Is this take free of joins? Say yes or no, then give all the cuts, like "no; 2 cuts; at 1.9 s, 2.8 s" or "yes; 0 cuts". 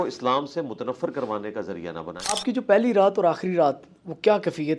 no; 1 cut; at 2.4 s